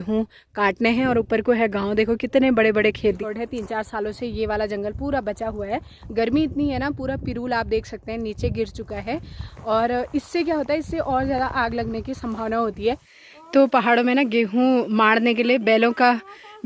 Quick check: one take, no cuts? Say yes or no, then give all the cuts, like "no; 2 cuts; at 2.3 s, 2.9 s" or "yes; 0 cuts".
no; 2 cuts; at 3.2 s, 13.1 s